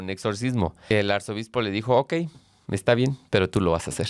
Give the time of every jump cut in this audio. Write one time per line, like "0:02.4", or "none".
0:00.9